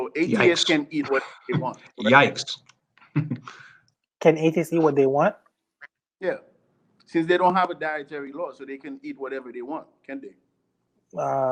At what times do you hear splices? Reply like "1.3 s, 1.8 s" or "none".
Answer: none